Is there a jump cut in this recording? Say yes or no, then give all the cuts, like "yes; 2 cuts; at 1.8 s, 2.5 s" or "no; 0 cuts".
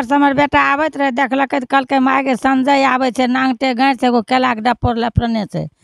no; 0 cuts